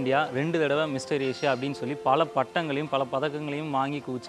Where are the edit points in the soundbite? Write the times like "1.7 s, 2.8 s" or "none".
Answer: none